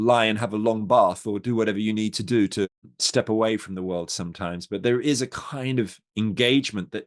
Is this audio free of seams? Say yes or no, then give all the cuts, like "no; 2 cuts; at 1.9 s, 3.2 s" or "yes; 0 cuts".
no; 2 cuts; at 3.0 s, 6.0 s